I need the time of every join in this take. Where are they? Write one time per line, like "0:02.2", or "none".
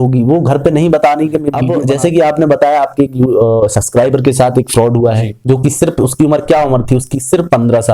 0:01.7